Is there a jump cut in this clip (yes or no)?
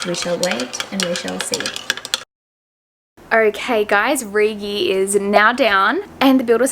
no